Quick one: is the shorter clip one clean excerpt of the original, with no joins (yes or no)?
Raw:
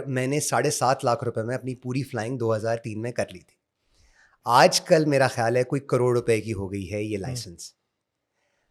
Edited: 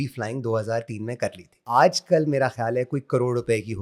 no